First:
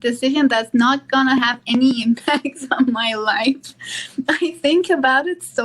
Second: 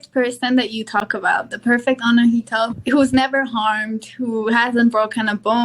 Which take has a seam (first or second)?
second